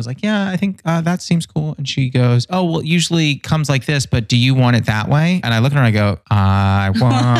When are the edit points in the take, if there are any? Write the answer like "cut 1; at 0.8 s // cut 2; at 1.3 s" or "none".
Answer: cut 1; at 5.4 s // cut 2; at 6.2 s